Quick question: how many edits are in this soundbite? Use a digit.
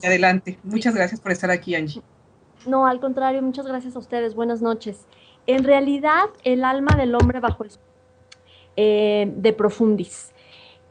0